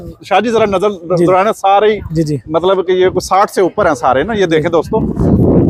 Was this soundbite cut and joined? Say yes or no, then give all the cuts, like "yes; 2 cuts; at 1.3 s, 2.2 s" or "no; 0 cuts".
no; 0 cuts